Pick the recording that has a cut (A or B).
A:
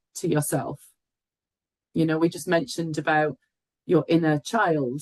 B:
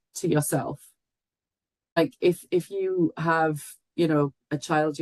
B